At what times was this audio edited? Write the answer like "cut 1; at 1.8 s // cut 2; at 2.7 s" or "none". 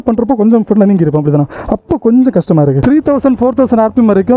cut 1; at 2.8 s